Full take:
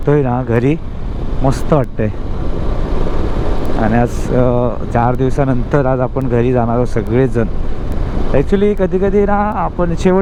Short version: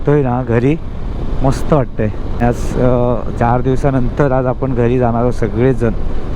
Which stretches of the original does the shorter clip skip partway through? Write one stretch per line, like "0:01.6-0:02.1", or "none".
0:02.4-0:04.0